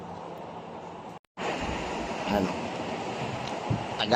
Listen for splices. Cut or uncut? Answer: cut